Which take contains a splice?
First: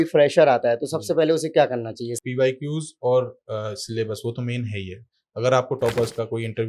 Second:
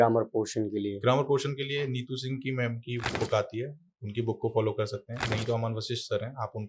first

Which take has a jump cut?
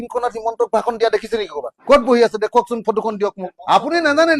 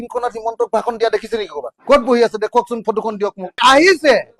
first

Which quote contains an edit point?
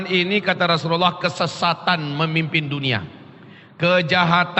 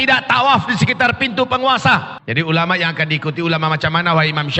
second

